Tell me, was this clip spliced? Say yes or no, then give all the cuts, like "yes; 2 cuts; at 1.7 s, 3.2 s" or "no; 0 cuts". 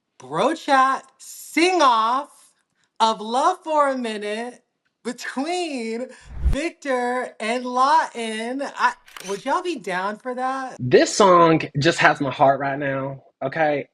yes; 2 cuts; at 9.1 s, 10.7 s